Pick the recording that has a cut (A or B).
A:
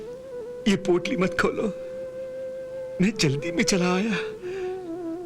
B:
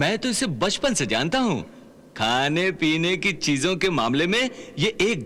A